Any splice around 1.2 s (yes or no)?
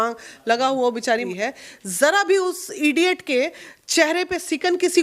yes